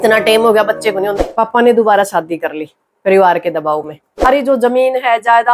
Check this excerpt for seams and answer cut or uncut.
cut